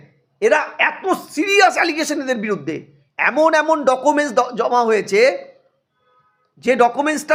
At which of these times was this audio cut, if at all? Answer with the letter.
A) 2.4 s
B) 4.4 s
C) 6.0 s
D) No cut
D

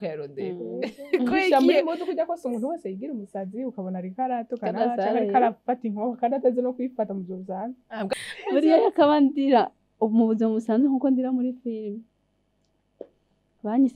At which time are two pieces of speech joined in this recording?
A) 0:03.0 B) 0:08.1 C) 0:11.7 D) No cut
B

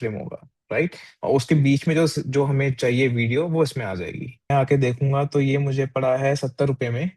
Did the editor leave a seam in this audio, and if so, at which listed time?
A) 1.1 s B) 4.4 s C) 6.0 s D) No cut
B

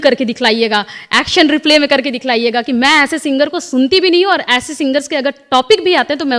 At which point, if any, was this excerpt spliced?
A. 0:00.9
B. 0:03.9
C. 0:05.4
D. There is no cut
D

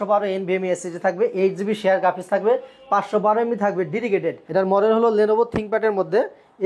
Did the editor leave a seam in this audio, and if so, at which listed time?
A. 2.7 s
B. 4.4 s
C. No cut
B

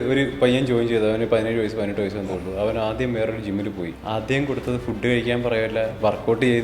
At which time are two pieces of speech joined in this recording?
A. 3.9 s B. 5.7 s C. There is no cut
A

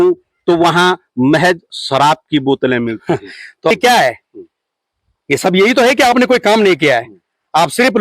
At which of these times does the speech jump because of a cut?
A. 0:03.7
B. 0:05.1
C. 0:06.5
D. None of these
A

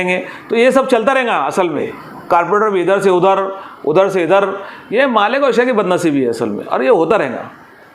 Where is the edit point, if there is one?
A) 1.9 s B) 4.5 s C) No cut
A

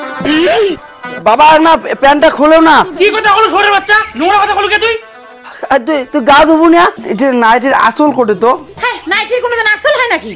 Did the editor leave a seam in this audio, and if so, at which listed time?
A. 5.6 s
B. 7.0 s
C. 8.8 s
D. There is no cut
B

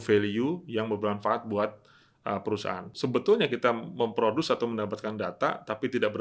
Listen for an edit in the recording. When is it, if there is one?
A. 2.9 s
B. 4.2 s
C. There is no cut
A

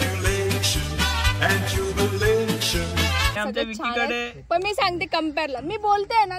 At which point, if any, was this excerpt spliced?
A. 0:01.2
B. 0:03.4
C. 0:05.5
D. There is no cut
B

